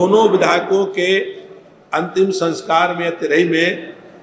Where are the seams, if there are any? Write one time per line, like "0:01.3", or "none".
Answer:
none